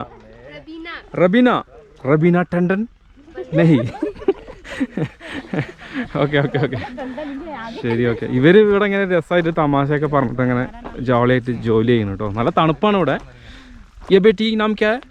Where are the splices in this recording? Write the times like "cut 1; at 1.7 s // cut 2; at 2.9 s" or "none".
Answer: none